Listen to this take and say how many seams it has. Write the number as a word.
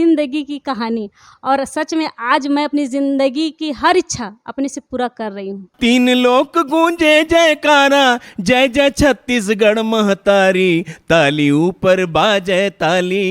one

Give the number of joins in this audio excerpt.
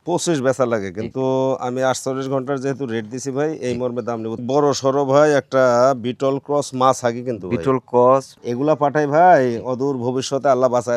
two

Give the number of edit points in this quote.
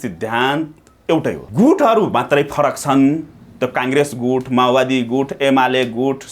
one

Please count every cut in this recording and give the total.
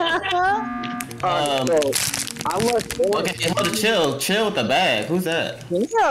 one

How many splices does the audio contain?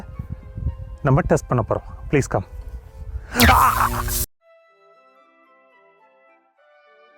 one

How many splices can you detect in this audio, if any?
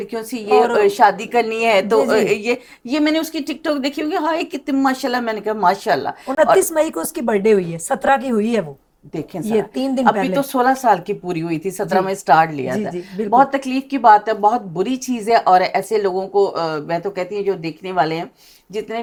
zero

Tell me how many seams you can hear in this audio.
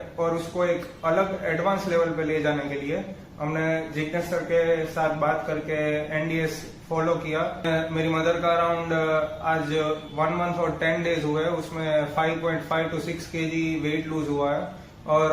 one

